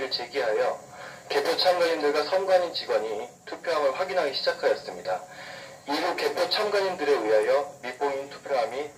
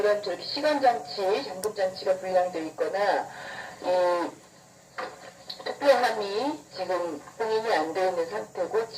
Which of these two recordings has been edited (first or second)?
second